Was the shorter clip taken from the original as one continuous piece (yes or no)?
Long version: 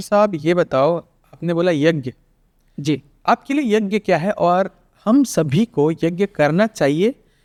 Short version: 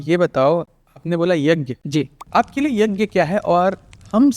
no